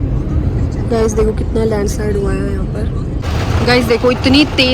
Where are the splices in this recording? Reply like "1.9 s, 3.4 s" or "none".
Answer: 3.2 s